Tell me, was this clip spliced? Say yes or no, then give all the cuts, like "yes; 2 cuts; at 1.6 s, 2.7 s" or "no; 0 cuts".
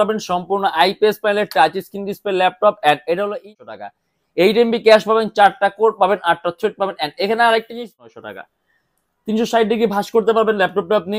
yes; 2 cuts; at 3.5 s, 8.0 s